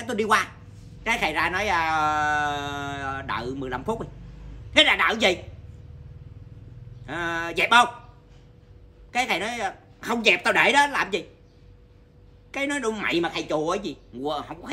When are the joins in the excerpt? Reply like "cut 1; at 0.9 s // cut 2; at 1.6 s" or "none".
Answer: none